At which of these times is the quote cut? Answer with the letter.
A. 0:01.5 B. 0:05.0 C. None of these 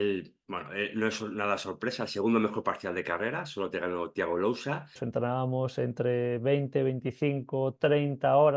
B